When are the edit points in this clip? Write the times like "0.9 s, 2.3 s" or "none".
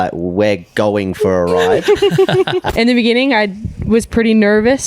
2.7 s